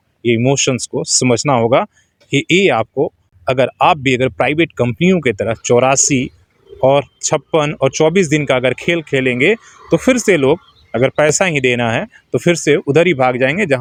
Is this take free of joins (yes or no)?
yes